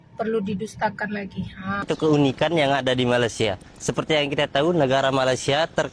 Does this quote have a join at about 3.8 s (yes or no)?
no